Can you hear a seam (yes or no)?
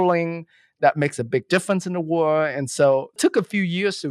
yes